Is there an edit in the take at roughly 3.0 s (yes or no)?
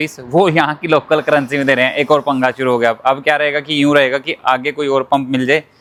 no